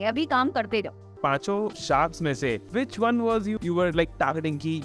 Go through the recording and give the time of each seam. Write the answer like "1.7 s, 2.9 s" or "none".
1.4 s, 2.6 s, 3.6 s